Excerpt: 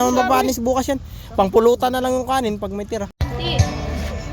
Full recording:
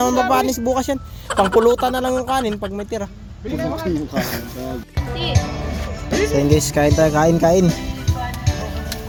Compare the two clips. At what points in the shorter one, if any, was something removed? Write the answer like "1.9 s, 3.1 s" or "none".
3.2 s